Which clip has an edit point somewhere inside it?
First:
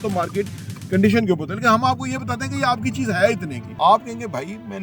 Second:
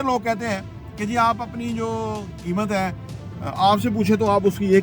first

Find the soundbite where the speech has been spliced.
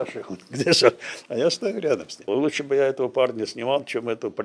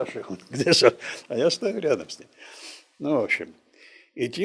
first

